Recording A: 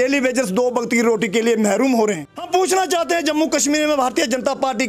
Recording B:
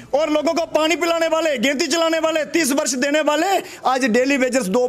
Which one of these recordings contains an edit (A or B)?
A